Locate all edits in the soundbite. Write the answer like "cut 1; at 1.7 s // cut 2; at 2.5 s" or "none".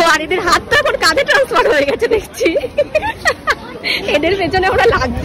none